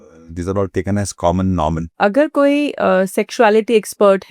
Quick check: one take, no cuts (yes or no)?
no